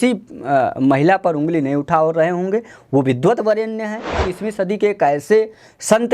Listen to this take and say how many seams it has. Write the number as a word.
one